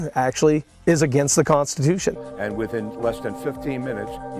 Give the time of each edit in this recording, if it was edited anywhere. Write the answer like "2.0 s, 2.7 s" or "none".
2.2 s

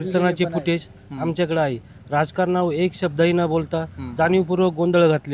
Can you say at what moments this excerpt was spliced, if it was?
none

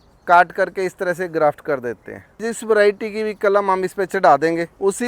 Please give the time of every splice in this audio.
2.5 s

